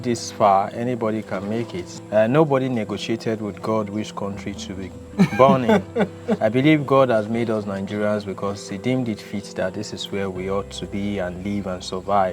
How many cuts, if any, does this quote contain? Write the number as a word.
two